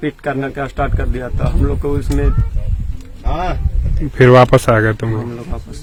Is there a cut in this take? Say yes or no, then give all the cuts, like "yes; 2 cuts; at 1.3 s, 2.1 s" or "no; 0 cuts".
no; 0 cuts